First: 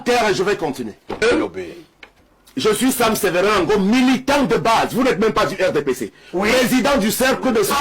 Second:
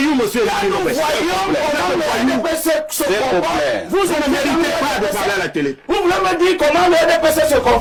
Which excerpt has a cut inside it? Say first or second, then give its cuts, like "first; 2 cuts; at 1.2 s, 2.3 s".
first; 1 cut; at 1.2 s